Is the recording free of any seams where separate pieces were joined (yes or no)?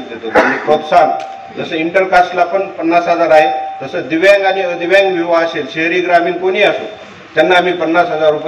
yes